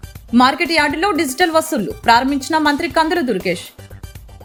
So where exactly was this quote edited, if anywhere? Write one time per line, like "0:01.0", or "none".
none